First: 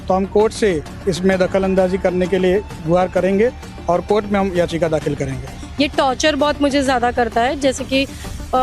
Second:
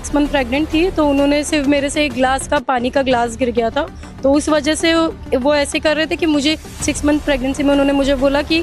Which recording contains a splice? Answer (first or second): first